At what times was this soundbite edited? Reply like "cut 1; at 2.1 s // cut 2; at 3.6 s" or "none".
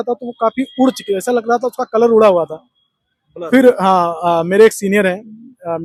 none